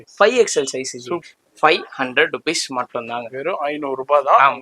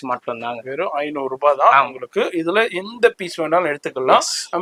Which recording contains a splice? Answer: first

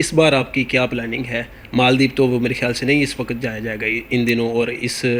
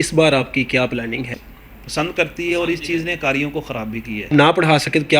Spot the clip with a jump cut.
second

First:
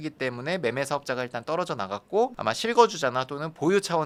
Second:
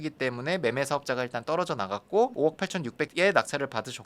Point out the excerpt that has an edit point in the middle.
second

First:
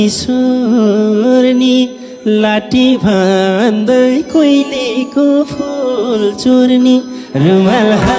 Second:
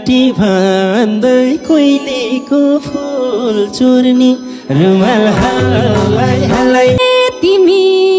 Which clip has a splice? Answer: second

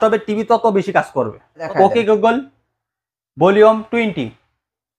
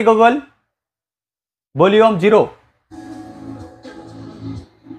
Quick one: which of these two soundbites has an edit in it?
first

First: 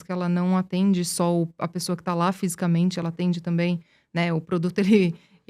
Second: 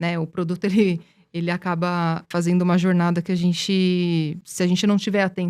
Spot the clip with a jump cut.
second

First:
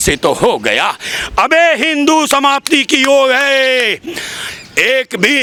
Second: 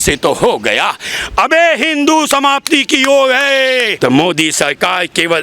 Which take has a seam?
second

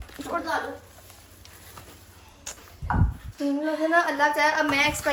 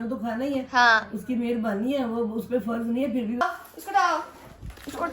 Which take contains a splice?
second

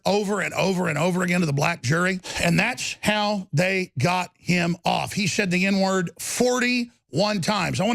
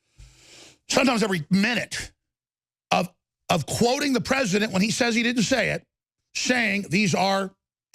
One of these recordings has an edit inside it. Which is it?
first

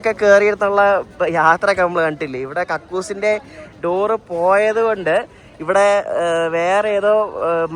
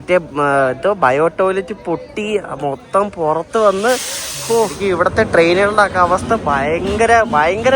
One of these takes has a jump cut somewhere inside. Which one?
second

